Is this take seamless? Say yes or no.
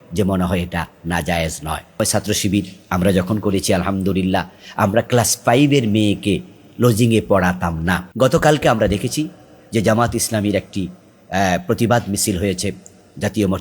no